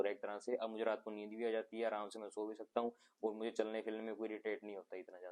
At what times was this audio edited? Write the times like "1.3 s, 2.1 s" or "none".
none

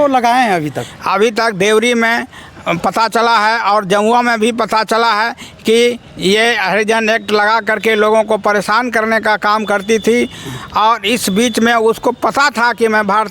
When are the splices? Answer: none

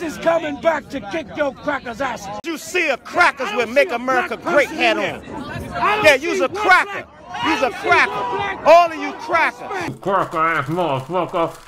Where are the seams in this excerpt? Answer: 2.4 s

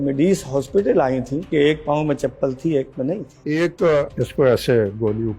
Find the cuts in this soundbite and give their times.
1.5 s, 3.3 s, 4.2 s

